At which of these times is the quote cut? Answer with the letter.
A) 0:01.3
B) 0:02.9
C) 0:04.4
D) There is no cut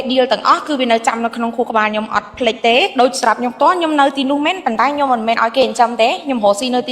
B